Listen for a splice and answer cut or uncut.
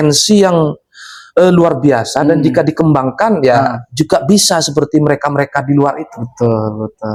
uncut